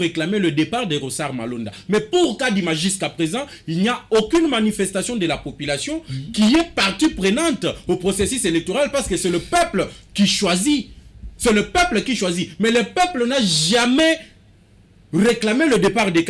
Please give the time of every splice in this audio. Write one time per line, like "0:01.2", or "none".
none